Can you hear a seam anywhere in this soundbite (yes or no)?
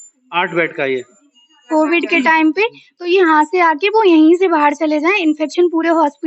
yes